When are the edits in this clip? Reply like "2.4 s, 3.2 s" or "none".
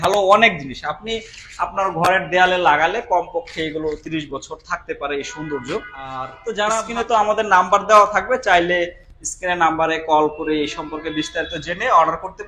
6.9 s